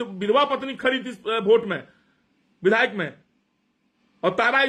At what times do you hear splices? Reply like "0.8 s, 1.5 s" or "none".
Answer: none